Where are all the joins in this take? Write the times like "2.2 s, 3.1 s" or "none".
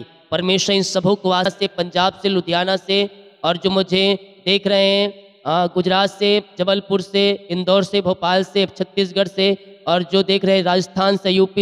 1.5 s